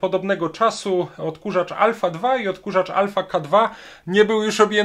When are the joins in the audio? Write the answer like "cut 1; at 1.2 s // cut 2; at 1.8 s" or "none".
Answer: cut 1; at 3.9 s